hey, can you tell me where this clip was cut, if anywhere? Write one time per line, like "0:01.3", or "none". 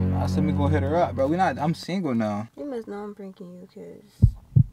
0:02.5